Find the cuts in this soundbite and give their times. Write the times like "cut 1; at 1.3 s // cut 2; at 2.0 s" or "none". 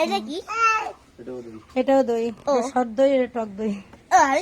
none